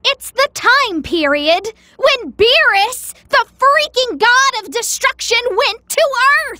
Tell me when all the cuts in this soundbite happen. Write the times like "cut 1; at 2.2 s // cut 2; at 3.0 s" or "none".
none

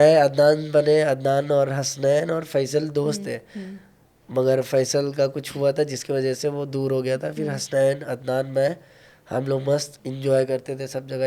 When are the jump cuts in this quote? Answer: none

